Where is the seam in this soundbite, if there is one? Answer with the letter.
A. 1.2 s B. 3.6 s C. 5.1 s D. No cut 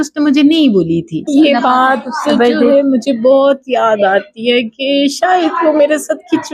A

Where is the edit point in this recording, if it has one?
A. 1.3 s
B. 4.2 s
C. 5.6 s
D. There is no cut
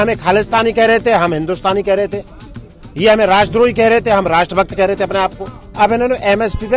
C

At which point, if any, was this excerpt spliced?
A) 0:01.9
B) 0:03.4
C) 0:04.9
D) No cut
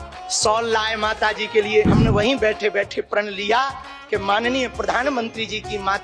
A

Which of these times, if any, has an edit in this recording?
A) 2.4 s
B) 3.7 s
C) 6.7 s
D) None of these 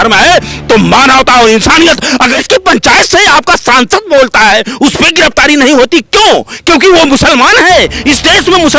A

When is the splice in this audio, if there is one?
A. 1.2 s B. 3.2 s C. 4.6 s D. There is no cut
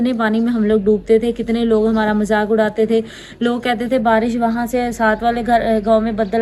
D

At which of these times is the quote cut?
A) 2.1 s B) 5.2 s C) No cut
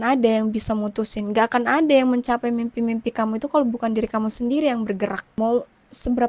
B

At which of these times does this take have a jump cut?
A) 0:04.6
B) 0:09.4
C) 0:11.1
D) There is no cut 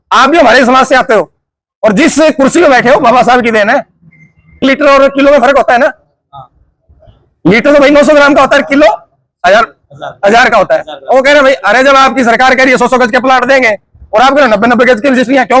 A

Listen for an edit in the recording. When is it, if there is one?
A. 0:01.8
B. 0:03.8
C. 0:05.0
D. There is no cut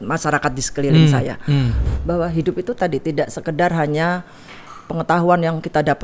A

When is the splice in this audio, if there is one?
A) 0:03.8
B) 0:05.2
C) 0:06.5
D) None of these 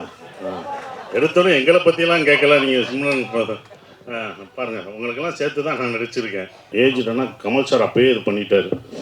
C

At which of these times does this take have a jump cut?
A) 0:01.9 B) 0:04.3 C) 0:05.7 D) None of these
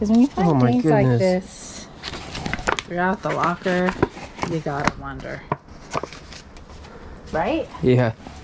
D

